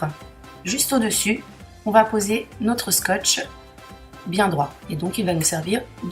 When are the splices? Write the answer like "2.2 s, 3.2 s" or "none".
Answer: 1.5 s